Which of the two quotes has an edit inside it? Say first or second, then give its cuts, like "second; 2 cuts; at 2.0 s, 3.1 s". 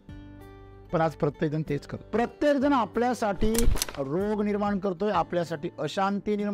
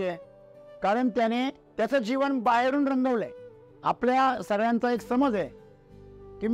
second; 1 cut; at 1.6 s